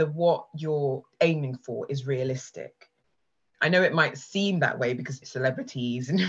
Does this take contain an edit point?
no; 0 cuts

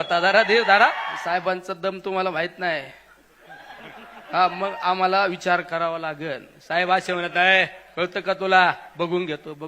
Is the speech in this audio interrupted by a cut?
yes; 1 cut; at 1.1 s

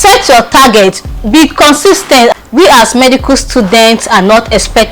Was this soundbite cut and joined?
yes; 1 cut; at 2.3 s

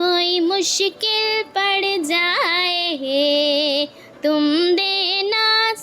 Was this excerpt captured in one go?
yes; 0 cuts

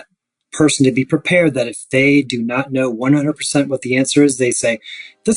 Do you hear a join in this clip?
no; 0 cuts

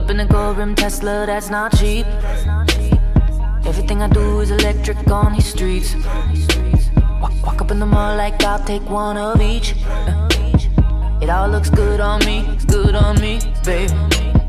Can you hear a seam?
no; 0 cuts

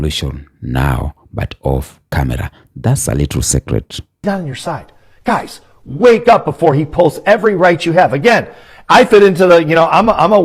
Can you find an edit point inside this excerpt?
yes; 1 cut; at 4.2 s

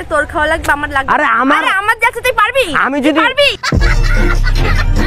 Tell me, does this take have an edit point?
no; 0 cuts

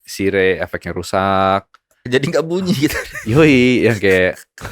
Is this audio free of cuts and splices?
yes; 0 cuts

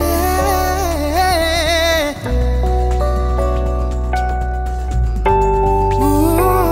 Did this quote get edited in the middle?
yes; 1 cut; at 1.2 s

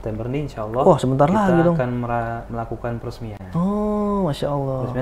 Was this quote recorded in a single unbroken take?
yes; 0 cuts

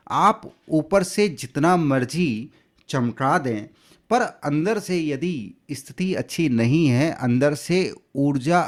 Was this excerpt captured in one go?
yes; 0 cuts

